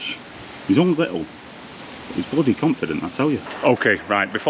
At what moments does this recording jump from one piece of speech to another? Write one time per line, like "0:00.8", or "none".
0:03.5